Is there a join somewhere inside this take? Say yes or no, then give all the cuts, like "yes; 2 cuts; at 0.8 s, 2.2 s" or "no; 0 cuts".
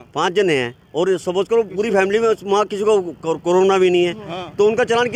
no; 0 cuts